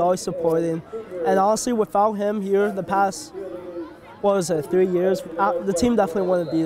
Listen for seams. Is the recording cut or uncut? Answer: uncut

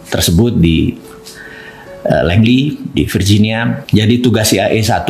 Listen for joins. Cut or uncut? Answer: cut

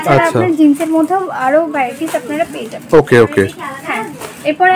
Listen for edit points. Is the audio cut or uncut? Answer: uncut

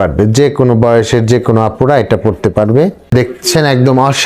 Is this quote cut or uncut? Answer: cut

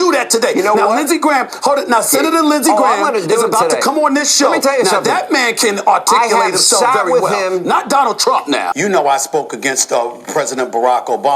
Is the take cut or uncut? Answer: cut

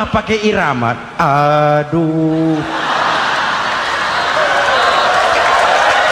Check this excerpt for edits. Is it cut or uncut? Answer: uncut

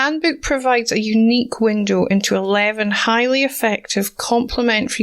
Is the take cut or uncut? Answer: uncut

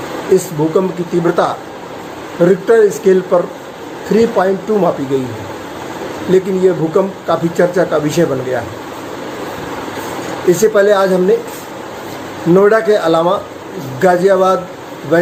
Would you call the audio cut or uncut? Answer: uncut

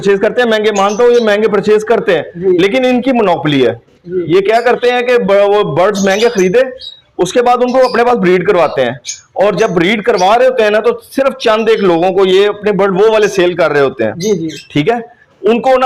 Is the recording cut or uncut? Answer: uncut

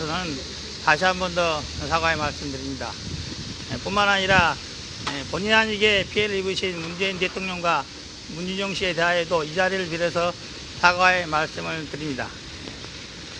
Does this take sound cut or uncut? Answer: uncut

